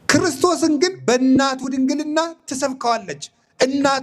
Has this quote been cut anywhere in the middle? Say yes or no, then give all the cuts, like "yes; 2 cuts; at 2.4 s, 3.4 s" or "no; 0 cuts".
yes; 1 cut; at 1.2 s